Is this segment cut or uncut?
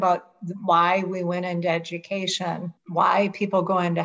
cut